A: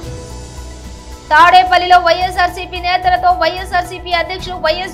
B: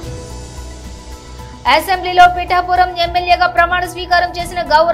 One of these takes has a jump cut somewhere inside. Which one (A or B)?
B